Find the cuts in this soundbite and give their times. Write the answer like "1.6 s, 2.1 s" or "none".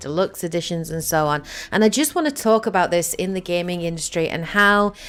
none

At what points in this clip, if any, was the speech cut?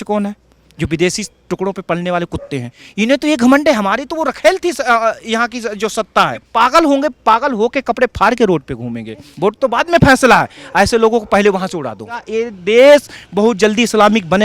2.8 s, 6.4 s, 9.3 s, 12.3 s

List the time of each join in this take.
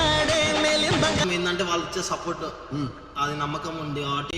1.2 s

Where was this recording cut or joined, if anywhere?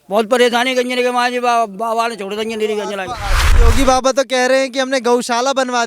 3.5 s

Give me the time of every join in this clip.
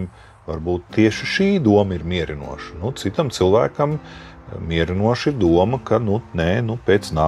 none

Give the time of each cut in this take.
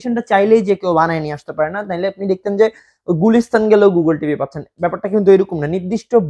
none

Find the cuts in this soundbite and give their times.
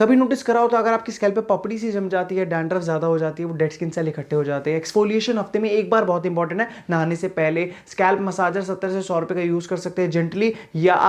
none

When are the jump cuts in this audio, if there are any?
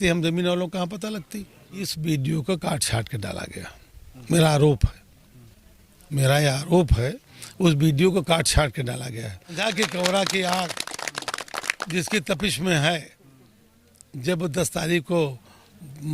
1.9 s, 9.6 s

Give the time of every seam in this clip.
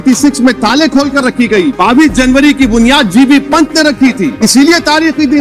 1.8 s, 4.3 s

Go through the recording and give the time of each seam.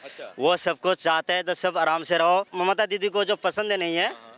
2.5 s

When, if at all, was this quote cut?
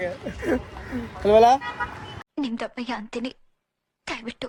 none

